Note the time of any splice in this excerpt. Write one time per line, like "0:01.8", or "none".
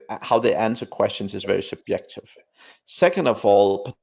none